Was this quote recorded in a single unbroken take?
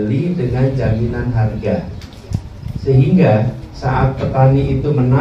yes; 0 cuts

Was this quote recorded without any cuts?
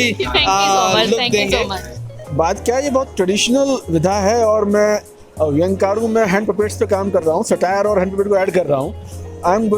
no; 1 cut; at 2.0 s

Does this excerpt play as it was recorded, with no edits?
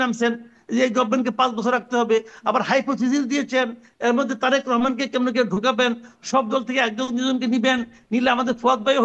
yes; 0 cuts

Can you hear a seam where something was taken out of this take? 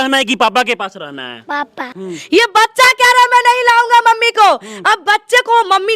yes; 1 cut; at 1.9 s

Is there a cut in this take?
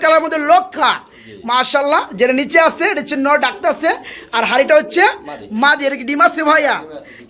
no; 0 cuts

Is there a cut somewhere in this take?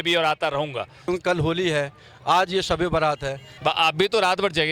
yes; 2 cuts; at 1.0 s, 3.5 s

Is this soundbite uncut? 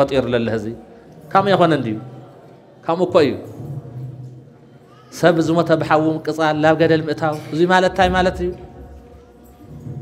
yes; 0 cuts

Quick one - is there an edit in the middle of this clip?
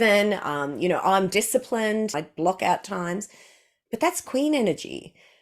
yes; 1 cut; at 2.2 s

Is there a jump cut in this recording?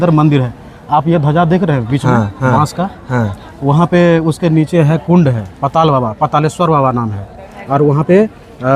no; 0 cuts

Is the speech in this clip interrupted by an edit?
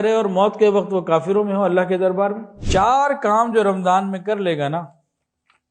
yes; 1 cut; at 2.5 s

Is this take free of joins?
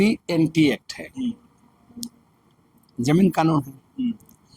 yes; 0 cuts

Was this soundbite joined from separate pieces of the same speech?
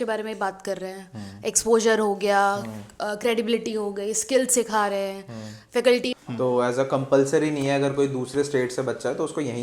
yes; 1 cut; at 6.1 s

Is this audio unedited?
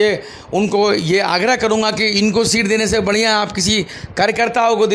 yes; 0 cuts

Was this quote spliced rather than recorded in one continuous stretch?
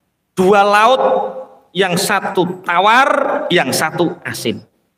no; 0 cuts

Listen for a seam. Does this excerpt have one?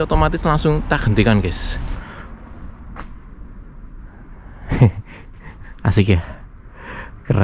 yes; 1 cut; at 2.0 s

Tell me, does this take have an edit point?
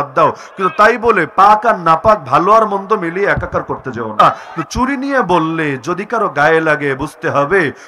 yes; 1 cut; at 4.2 s

